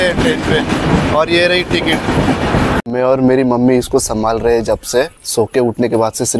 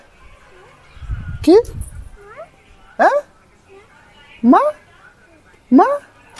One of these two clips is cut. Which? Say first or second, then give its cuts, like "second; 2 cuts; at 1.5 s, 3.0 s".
first; 2 cuts; at 2.8 s, 5.2 s